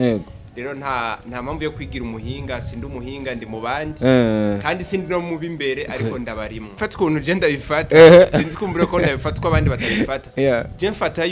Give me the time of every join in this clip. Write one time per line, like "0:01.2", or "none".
0:06.7